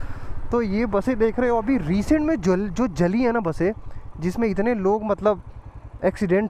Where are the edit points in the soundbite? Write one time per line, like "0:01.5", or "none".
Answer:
none